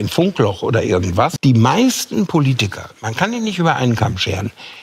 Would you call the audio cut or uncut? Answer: cut